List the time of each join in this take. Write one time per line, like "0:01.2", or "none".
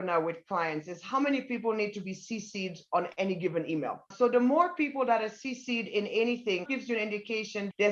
none

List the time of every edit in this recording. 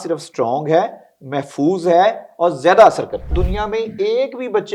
0:03.4

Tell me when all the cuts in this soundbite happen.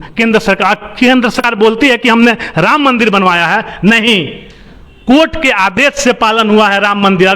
0:01.4

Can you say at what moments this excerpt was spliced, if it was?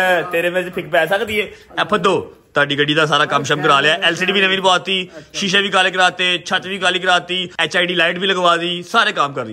0:07.7

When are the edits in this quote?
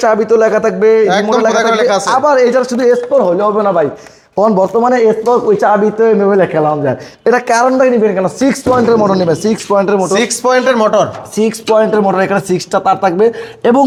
none

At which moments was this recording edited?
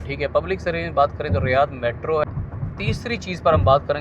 0:02.2

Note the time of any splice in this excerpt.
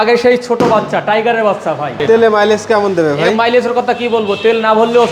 0:02.0

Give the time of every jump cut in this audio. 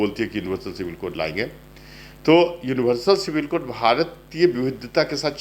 none

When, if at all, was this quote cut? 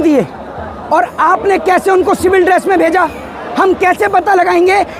none

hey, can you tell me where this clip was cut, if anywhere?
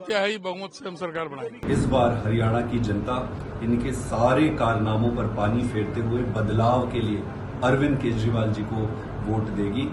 0:01.6

